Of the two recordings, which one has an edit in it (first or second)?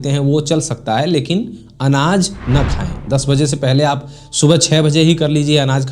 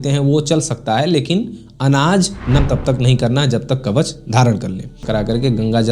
second